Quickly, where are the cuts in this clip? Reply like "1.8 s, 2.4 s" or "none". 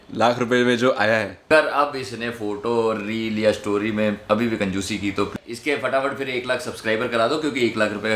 1.4 s, 5.3 s

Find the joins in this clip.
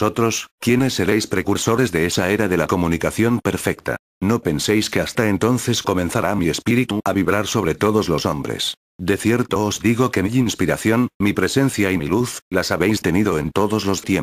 none

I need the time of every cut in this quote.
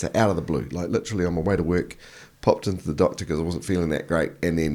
none

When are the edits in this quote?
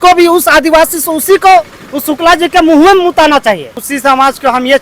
3.9 s

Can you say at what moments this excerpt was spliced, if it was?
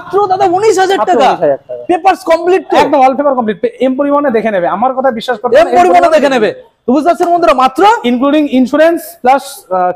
none

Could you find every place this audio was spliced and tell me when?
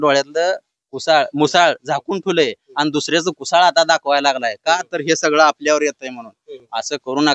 none

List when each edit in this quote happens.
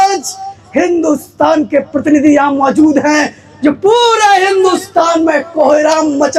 none

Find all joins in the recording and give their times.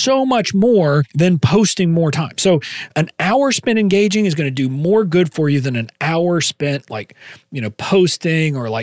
1.1 s, 2.8 s

